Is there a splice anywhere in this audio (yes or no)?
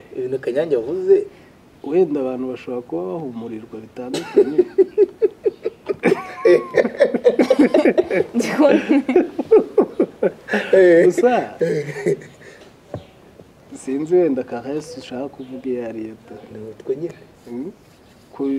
no